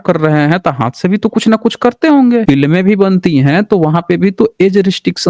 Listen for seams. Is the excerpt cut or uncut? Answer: cut